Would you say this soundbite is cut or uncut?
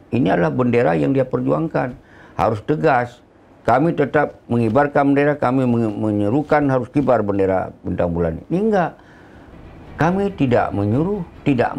uncut